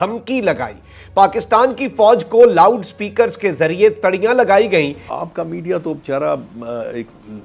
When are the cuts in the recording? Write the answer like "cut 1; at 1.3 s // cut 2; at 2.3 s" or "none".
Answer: cut 1; at 5.0 s